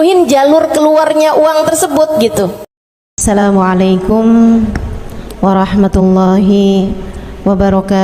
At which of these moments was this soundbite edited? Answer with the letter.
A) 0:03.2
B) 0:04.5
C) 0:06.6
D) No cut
A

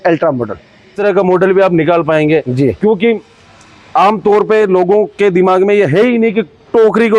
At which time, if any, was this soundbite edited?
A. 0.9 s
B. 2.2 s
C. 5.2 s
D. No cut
A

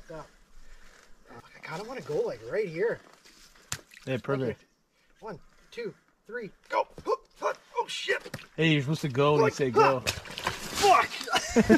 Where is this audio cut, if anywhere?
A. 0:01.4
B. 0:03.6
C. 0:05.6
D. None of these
A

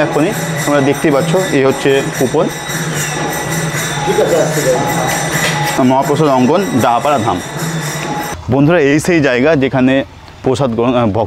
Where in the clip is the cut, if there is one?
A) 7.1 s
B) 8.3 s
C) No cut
B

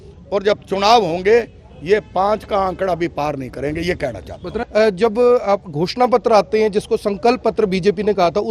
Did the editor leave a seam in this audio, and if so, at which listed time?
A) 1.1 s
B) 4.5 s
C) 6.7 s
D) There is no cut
B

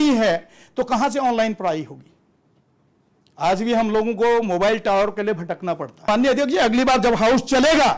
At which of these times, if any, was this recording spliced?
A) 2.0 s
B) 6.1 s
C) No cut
B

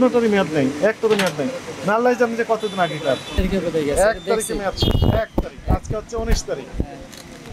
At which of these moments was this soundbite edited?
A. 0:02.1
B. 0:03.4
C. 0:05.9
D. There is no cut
B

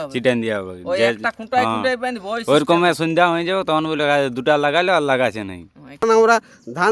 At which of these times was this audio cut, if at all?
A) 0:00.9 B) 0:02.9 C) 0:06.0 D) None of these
C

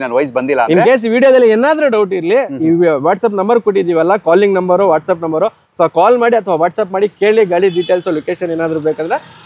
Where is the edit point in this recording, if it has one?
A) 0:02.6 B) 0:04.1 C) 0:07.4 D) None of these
D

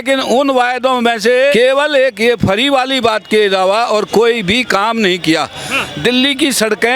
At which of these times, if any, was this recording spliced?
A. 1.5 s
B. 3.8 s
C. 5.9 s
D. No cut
A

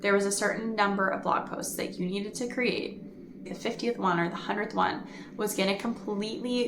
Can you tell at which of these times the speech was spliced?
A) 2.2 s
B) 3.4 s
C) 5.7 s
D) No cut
B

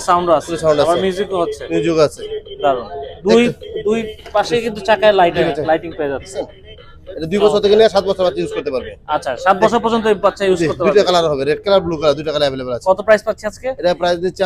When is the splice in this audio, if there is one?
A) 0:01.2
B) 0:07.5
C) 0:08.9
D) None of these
D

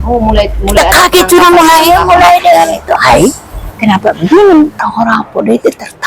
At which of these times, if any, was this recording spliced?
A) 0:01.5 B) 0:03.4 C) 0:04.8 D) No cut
C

